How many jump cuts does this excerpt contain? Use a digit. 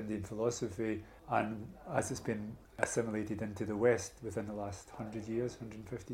2